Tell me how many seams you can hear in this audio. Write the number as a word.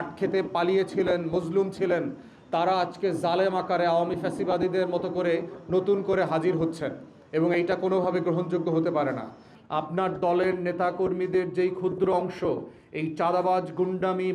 one